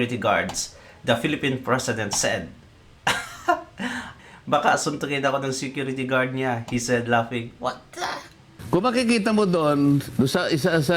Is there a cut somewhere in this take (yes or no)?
yes